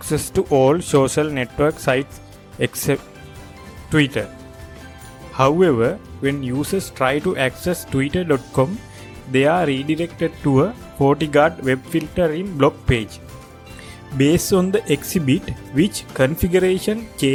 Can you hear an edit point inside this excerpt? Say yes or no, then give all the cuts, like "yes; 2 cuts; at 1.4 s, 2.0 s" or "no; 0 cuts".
no; 0 cuts